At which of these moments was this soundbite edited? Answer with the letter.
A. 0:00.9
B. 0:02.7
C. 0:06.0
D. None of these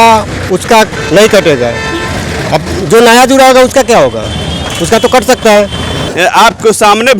C